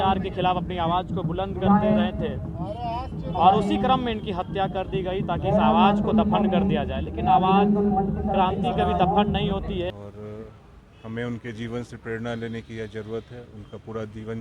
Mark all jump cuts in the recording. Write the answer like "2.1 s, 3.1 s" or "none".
9.9 s